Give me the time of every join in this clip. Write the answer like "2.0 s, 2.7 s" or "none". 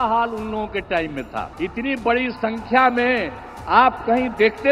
1.5 s